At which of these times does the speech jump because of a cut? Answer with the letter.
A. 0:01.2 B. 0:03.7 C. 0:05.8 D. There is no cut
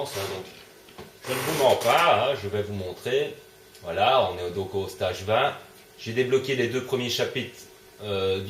B